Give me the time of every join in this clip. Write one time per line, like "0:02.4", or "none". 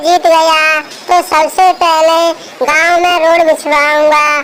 none